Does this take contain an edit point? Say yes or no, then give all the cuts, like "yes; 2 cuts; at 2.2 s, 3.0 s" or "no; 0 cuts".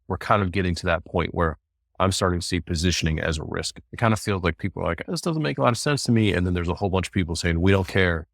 yes; 1 cut; at 3.8 s